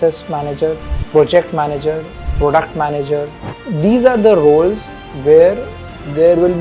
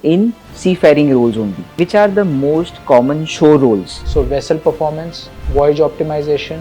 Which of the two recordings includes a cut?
second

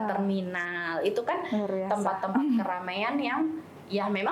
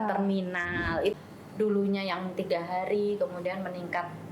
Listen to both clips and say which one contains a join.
second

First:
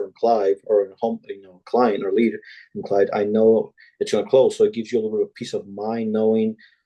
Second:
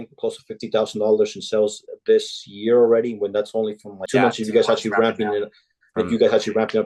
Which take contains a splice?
second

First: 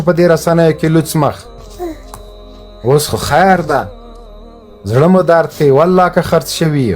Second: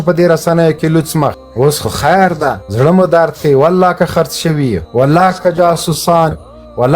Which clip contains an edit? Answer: second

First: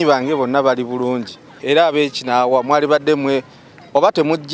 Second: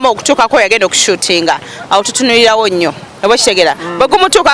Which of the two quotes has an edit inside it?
first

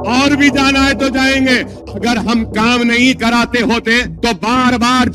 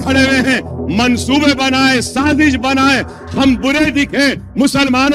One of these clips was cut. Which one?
first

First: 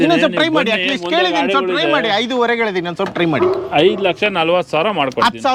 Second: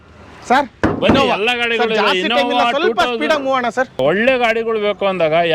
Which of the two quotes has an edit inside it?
second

